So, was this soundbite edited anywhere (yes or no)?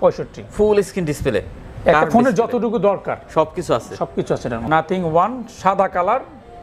yes